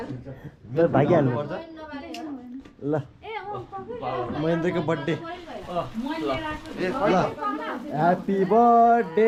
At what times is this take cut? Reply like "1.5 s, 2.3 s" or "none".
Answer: none